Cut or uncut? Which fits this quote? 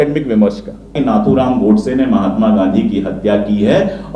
cut